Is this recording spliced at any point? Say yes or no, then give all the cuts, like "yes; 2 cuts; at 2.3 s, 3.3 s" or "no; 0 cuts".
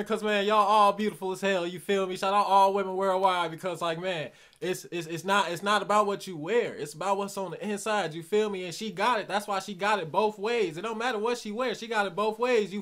no; 0 cuts